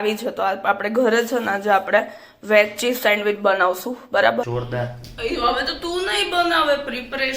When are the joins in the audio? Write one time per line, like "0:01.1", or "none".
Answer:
0:04.5